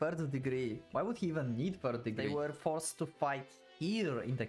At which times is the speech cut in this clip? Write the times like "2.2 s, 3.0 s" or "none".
2.3 s